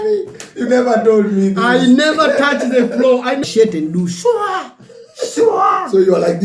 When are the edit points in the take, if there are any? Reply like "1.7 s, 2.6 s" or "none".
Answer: 3.5 s